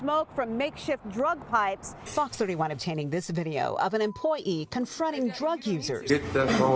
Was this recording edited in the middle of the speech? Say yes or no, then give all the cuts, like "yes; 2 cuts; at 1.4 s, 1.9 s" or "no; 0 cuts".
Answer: yes; 2 cuts; at 2.1 s, 6.1 s